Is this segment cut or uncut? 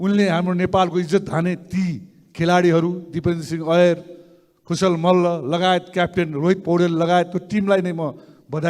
uncut